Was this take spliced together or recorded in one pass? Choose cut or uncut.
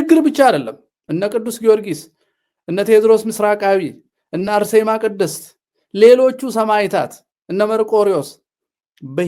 uncut